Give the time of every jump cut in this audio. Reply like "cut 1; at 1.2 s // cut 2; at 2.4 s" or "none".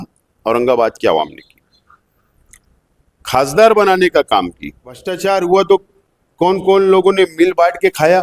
cut 1; at 5.1 s